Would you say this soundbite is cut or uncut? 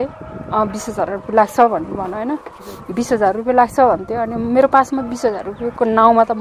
uncut